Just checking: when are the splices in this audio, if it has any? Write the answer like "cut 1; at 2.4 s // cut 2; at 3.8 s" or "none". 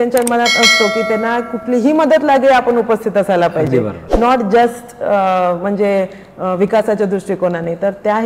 none